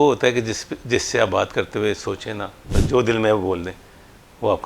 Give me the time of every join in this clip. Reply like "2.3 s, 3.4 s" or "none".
2.7 s